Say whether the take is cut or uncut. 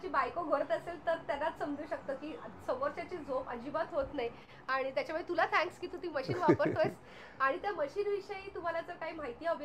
uncut